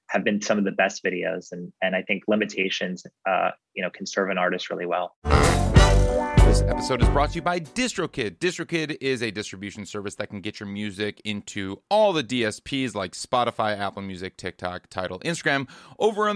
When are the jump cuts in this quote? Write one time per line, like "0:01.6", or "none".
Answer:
0:05.2